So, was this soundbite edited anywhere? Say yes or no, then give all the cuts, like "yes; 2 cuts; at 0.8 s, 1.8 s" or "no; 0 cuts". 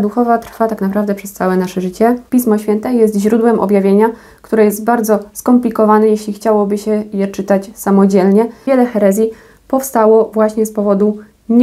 yes; 2 cuts; at 2.2 s, 8.6 s